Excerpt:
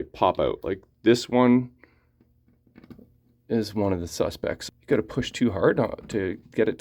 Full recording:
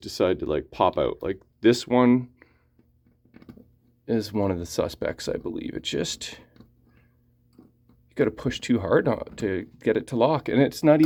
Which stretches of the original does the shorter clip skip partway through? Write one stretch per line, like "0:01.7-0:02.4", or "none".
0:05.2-0:07.9